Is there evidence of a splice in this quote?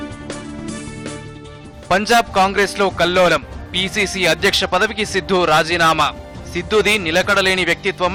no; 0 cuts

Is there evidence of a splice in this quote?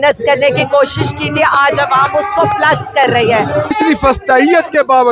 yes; 1 cut; at 3.7 s

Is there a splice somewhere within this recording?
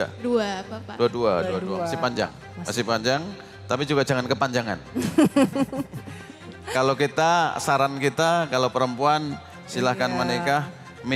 no; 0 cuts

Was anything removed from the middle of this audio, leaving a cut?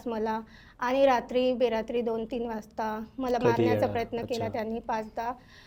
no; 0 cuts

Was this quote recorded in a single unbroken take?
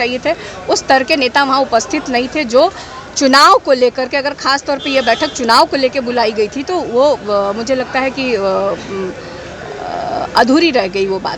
yes; 0 cuts

